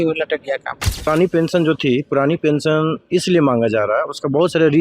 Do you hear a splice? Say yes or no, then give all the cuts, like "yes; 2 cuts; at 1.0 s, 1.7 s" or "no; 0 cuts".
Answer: yes; 1 cut; at 1.1 s